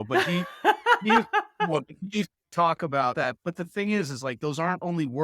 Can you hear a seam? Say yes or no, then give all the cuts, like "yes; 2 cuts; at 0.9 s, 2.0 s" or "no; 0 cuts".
yes; 1 cut; at 3.2 s